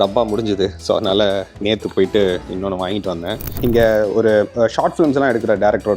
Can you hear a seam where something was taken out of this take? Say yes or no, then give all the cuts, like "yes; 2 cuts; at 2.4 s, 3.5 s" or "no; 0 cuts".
yes; 1 cut; at 3.5 s